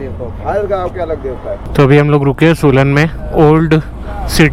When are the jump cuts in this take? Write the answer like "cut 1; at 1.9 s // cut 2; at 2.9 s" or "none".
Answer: none